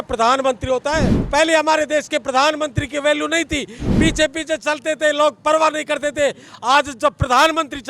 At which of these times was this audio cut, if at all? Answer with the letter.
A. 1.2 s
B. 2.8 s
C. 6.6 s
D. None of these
A